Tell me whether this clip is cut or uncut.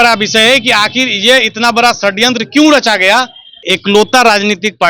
cut